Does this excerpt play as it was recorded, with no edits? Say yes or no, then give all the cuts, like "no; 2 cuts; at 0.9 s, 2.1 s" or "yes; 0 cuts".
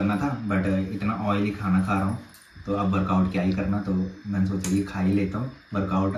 yes; 0 cuts